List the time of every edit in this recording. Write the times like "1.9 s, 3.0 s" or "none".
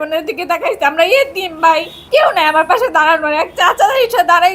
1.9 s